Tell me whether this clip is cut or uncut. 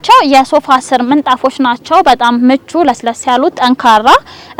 uncut